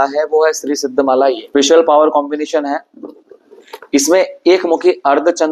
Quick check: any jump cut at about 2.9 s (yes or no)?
no